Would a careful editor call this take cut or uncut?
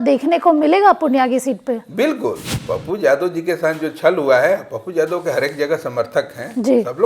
cut